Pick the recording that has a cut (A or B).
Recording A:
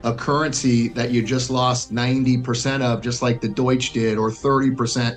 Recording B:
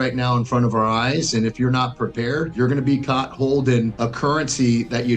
B